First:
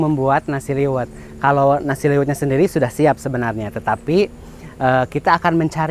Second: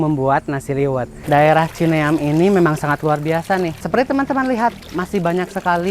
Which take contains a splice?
second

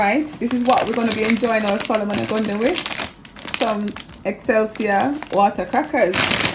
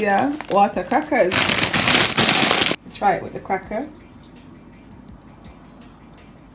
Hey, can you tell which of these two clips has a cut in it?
second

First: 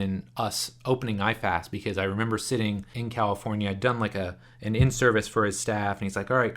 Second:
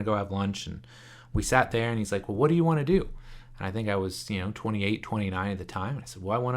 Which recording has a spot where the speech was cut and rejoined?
first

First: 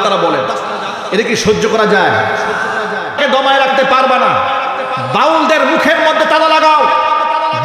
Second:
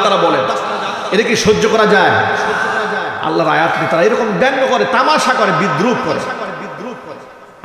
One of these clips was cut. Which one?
first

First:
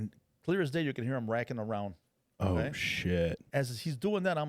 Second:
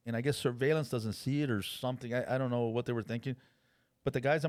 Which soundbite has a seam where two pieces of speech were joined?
first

